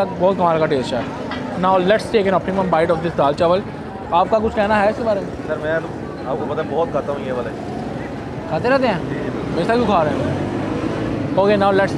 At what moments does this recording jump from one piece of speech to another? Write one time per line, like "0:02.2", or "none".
none